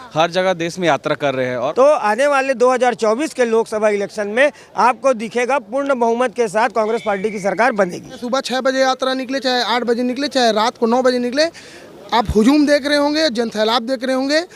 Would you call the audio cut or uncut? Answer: cut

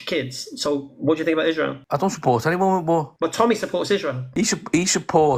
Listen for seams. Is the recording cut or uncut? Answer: cut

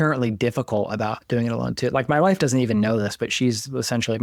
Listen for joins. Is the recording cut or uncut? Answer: uncut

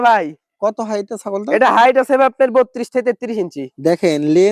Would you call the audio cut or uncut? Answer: uncut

